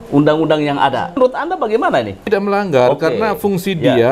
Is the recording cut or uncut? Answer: cut